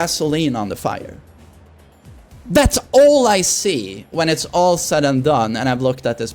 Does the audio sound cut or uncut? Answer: uncut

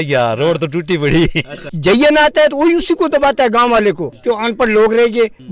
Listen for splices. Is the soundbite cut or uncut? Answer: cut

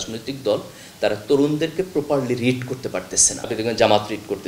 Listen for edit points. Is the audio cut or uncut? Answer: cut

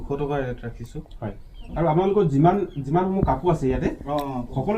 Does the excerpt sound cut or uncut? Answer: cut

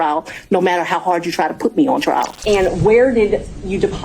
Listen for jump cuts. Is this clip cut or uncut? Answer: cut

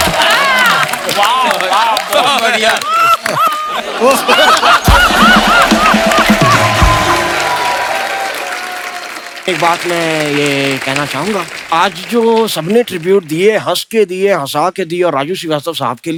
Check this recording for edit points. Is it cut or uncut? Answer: uncut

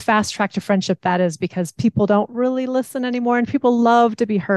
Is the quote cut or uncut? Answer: uncut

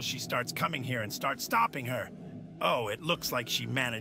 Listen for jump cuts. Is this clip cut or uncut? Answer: uncut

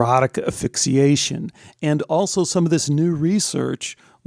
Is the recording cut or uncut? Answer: uncut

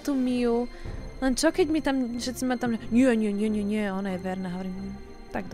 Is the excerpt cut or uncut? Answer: uncut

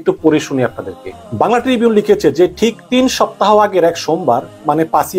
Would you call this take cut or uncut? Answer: uncut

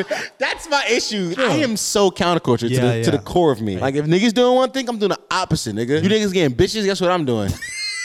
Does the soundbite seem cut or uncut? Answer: cut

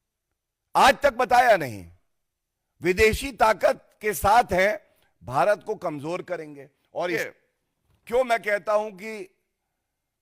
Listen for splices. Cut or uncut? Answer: cut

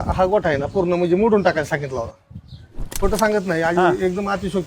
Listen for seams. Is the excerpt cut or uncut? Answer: cut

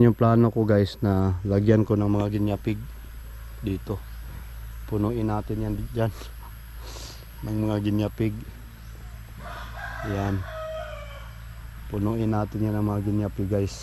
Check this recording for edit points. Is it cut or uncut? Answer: uncut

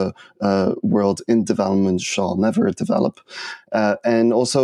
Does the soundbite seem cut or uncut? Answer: uncut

